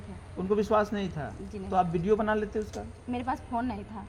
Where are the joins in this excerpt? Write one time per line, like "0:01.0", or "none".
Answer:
none